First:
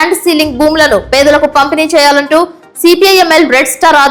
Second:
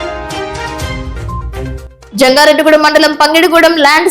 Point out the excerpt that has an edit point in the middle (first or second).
second